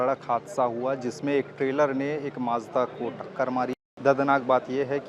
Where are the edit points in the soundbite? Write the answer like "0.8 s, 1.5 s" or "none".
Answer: 3.8 s